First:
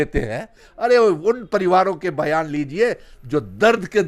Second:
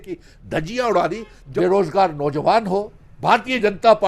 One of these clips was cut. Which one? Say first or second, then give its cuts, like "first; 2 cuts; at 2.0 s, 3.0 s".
second; 1 cut; at 1.3 s